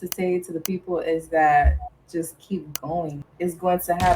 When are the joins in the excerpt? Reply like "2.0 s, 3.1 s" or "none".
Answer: 3.2 s